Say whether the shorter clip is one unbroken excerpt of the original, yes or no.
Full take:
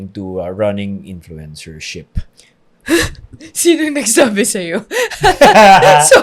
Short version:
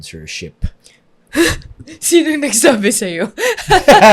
yes